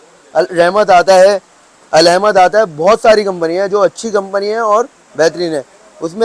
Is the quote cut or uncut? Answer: uncut